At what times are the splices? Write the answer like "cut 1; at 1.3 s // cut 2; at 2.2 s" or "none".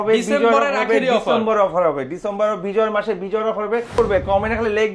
cut 1; at 4.0 s